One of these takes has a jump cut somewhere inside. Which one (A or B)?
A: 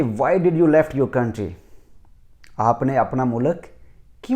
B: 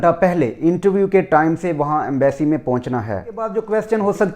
B